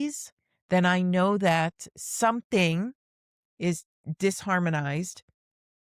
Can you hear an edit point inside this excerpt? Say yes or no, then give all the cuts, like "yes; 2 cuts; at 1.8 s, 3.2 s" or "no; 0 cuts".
no; 0 cuts